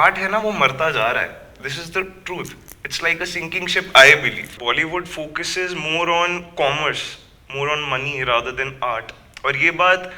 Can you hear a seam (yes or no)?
yes